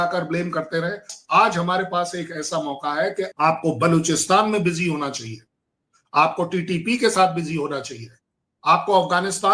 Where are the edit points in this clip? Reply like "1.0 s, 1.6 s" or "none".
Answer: 1.1 s, 3.3 s